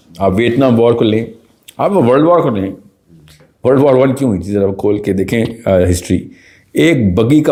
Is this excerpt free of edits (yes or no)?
yes